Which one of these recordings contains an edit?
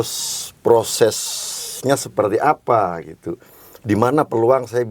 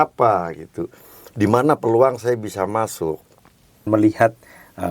second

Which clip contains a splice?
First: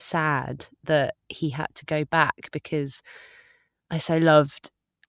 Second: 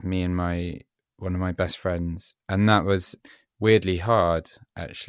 second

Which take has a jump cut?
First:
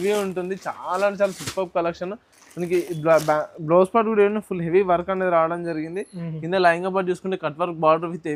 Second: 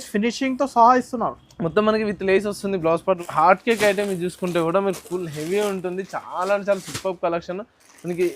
second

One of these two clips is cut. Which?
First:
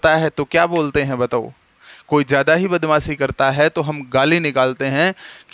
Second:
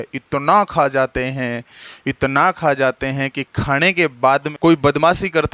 second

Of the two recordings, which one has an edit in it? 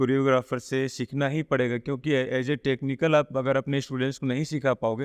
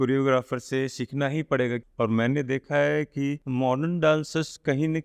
second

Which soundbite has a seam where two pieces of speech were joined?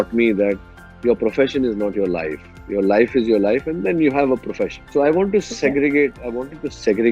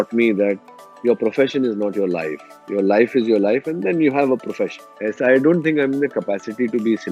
second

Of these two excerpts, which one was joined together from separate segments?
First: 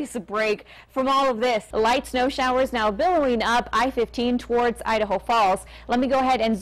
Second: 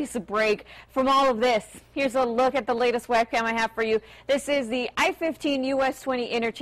first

